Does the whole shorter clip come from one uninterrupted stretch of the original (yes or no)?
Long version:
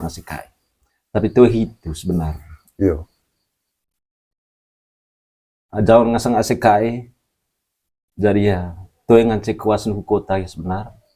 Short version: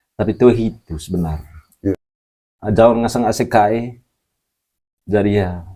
no